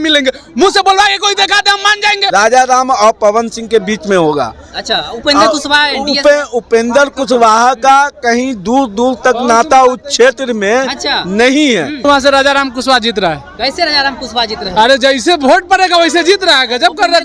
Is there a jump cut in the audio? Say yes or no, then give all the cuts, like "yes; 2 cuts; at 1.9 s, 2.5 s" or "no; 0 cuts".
yes; 2 cuts; at 2.3 s, 12.0 s